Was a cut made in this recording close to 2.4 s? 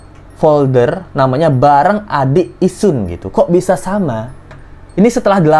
no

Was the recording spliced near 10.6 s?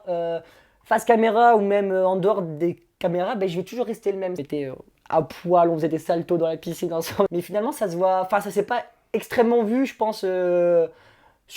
no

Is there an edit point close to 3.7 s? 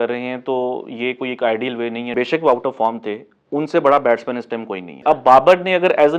no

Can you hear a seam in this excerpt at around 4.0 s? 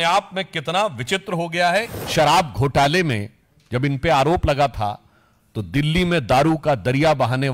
no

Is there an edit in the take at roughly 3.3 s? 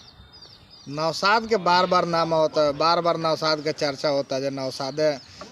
no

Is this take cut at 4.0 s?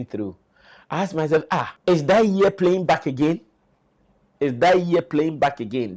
no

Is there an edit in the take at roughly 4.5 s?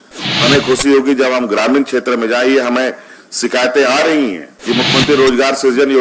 yes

